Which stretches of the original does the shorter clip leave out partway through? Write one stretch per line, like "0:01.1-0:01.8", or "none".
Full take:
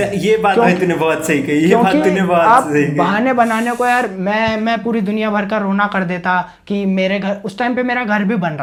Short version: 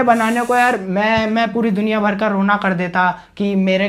none